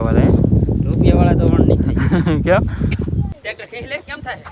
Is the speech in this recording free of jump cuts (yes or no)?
no